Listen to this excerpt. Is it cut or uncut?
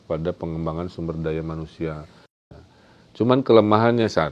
cut